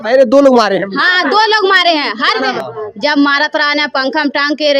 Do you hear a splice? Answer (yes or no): yes